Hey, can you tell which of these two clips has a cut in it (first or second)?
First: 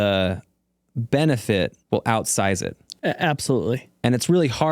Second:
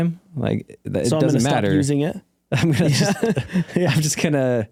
first